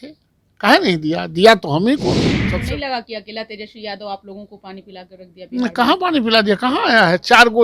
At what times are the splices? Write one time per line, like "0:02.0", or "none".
0:02.3